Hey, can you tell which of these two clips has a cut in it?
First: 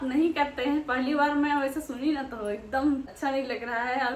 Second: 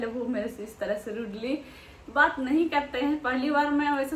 first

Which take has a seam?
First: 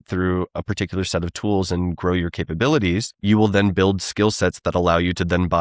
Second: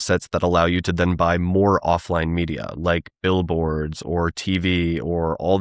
first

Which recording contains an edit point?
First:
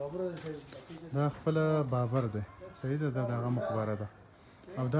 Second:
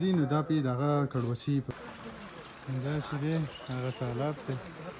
second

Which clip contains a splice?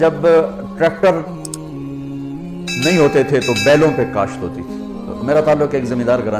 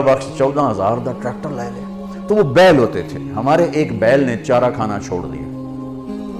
first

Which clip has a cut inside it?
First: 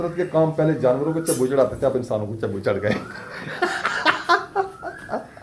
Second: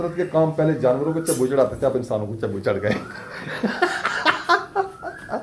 first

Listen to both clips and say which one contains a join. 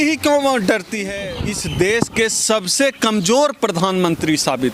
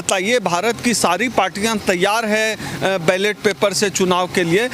first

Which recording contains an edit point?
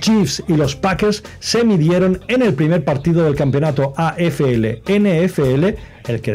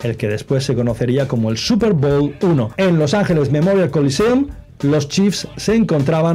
second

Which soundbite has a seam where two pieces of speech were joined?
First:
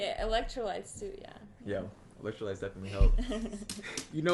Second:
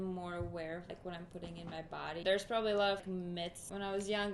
second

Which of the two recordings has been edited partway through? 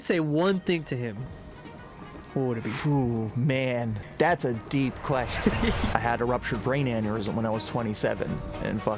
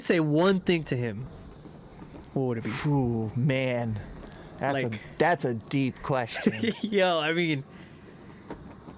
first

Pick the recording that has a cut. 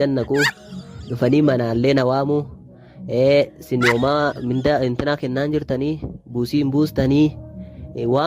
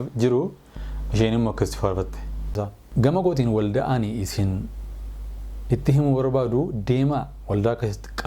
second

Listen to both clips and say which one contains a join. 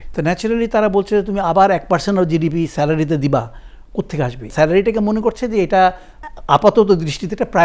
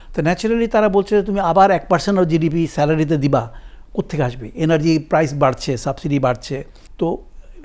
first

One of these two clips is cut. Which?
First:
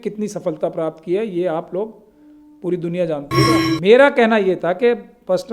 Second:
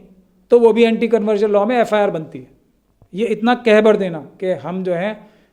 first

